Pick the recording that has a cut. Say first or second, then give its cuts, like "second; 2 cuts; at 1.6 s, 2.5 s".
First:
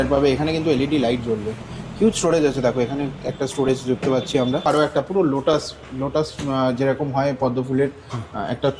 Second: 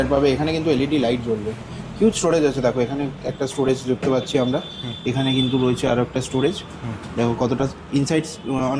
first; 1 cut; at 4.7 s